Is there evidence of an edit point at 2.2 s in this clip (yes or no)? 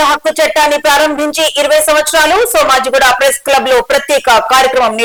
no